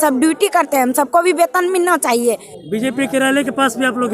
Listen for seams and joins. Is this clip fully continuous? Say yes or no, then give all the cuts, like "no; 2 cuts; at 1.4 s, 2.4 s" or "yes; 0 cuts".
no; 1 cut; at 2.5 s